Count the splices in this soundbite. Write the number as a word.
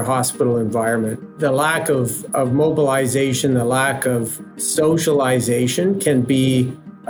two